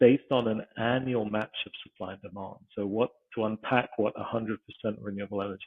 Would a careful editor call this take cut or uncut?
uncut